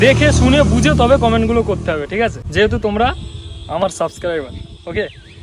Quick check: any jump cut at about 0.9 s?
no; 1 cut; at 2.4 s

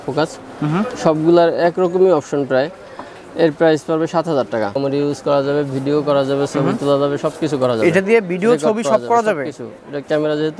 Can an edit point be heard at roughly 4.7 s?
yes; 1 cut; at 4.7 s

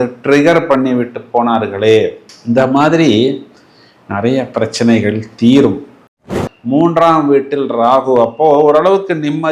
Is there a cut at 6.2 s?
yes; 1 cut; at 6.2 s

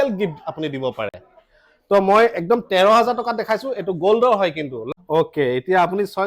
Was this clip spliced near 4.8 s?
yes; 1 cut; at 4.8 s

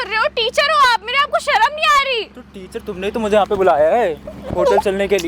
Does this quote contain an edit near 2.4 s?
no; 0 cuts

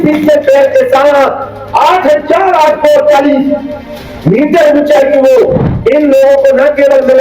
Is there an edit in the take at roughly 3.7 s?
no; 1 cut; at 5.6 s

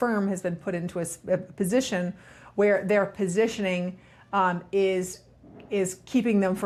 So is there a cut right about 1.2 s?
no; 0 cuts

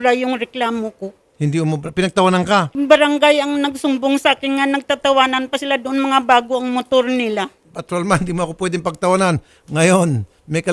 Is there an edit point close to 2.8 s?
yes; 1 cut; at 2.8 s

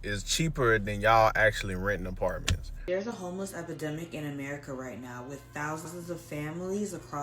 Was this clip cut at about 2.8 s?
yes; 1 cut; at 2.8 s

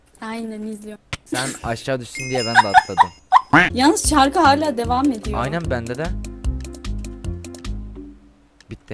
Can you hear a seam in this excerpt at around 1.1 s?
yes; 2 cuts; at 1.1 s, 3.6 s

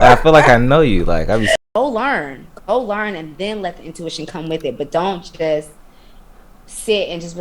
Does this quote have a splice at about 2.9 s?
no; 1 cut; at 1.5 s

